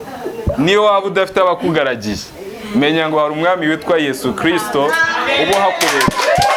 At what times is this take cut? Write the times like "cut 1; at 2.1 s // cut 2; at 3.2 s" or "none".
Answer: none